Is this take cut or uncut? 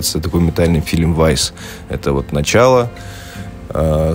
uncut